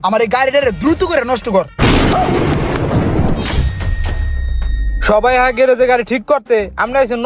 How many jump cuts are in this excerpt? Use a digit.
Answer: 0